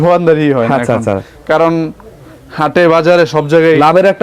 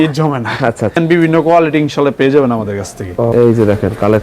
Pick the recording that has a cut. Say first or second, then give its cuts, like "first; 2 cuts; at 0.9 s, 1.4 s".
second; 2 cuts; at 1.0 s, 3.3 s